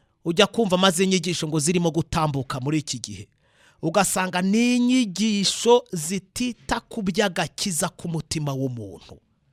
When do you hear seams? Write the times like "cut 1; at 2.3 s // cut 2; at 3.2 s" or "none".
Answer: none